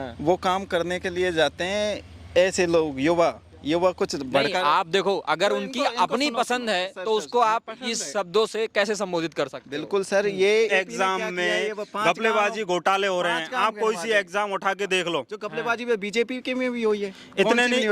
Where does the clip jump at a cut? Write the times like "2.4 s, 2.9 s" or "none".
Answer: 10.7 s